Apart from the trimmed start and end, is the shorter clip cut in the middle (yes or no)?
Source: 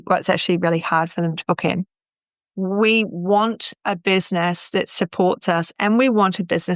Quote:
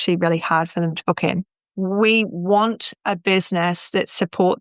yes